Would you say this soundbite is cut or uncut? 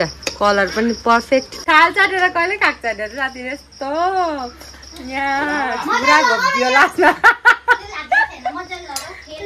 cut